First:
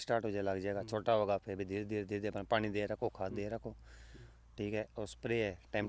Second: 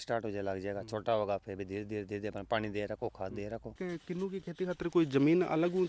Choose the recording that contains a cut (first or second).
second